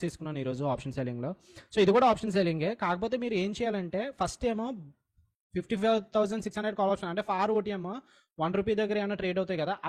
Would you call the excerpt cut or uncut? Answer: uncut